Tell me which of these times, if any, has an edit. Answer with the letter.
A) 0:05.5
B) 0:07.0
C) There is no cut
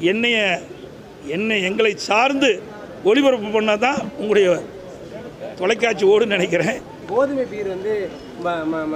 B